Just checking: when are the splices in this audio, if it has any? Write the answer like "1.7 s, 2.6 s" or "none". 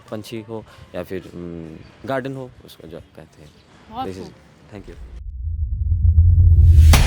5.3 s